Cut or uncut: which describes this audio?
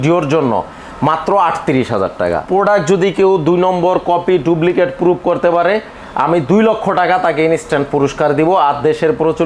cut